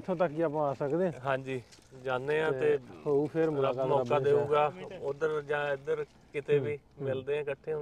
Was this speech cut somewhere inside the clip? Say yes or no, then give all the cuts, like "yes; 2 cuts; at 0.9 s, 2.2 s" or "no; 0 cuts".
no; 0 cuts